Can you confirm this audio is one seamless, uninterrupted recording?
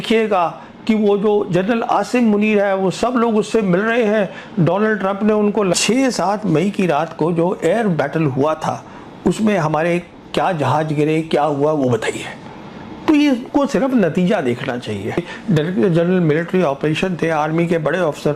no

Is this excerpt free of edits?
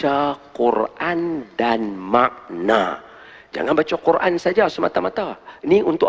yes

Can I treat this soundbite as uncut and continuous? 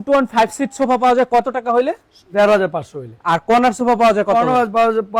yes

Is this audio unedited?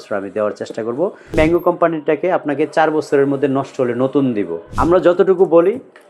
no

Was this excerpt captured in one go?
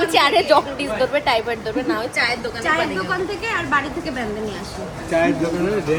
yes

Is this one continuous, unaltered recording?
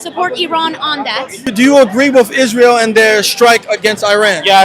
no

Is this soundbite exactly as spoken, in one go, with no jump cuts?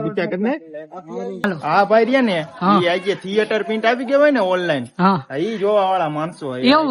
no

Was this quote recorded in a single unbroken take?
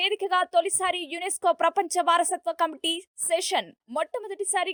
yes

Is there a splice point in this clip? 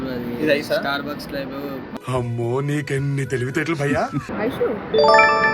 yes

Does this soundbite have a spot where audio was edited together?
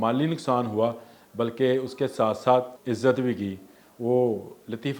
yes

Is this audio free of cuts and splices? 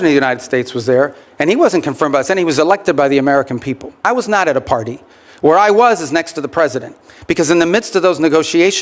no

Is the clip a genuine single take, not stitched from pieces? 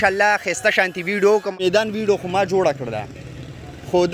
no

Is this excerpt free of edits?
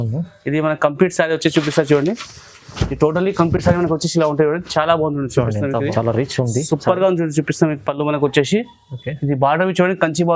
no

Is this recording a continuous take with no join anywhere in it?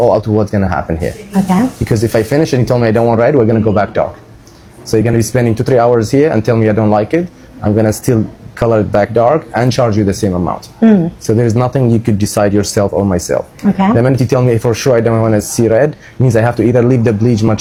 yes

